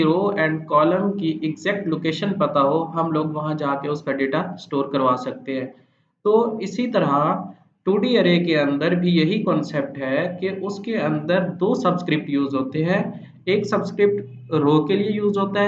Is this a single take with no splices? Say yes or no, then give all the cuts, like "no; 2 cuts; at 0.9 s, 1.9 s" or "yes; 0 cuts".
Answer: yes; 0 cuts